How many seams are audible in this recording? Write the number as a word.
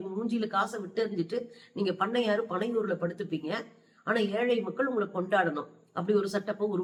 zero